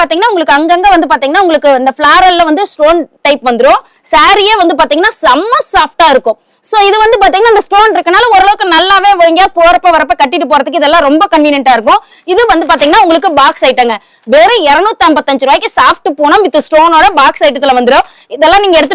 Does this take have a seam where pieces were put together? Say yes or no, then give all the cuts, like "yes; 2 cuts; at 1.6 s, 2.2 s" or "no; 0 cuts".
no; 0 cuts